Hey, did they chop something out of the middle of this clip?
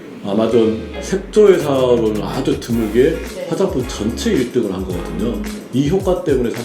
yes; 1 cut; at 0.9 s

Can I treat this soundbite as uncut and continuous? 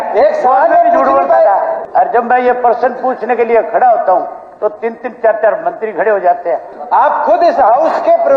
no; 2 cuts; at 1.8 s, 6.7 s

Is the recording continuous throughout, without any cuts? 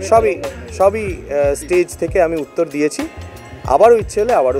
yes; 0 cuts

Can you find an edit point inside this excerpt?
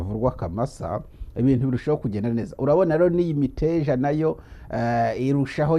no; 0 cuts

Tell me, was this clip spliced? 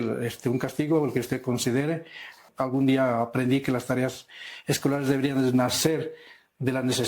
yes; 1 cut; at 2.4 s

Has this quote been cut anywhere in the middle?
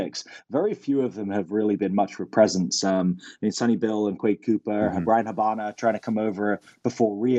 no; 0 cuts

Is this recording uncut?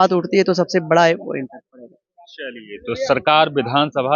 yes; 0 cuts

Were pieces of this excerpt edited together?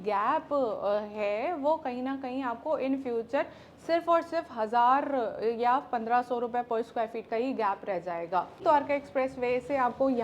yes; 1 cut; at 8.6 s

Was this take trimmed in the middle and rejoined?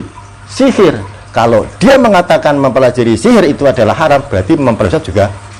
no; 0 cuts

